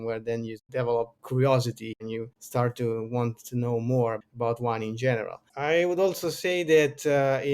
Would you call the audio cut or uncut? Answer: cut